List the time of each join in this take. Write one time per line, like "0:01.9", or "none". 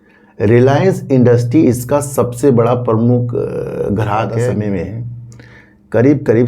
0:04.5